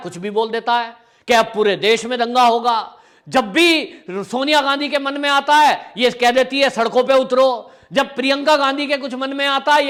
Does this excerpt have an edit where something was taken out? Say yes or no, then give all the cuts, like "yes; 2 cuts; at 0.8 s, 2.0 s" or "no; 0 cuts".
no; 0 cuts